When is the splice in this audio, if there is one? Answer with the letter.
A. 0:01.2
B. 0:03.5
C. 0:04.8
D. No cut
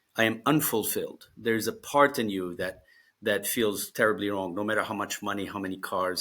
D